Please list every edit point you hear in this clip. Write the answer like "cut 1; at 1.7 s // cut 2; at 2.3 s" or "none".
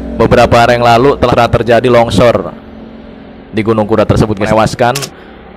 cut 1; at 1.3 s // cut 2; at 4.5 s